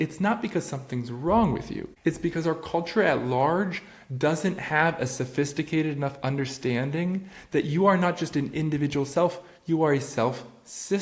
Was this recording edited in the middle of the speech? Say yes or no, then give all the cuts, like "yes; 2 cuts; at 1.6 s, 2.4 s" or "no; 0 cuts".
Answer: yes; 1 cut; at 1.8 s